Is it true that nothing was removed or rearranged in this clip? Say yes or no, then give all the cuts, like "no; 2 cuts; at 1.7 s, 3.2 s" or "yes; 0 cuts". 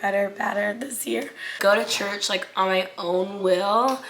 no; 1 cut; at 1.6 s